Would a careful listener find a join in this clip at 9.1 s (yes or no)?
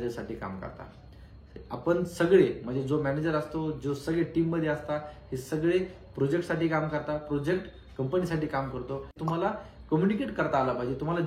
yes